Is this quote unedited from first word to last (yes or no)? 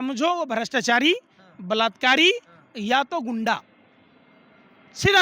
yes